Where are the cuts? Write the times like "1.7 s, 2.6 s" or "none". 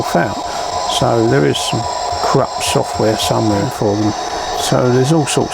3.7 s